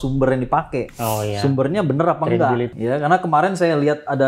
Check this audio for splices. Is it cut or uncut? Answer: cut